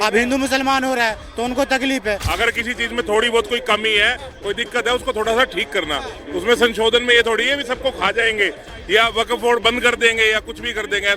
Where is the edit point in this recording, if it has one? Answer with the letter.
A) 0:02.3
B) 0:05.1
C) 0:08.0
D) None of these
A